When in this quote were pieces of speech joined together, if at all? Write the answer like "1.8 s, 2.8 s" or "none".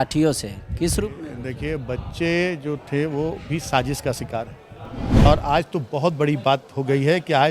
5.3 s